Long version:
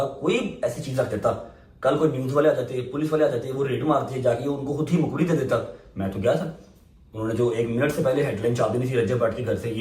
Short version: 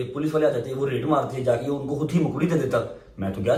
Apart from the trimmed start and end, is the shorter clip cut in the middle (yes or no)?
no